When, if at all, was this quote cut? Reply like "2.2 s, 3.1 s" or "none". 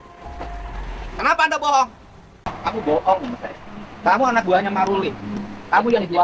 2.4 s